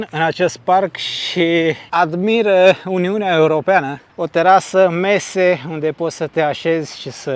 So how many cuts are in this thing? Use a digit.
0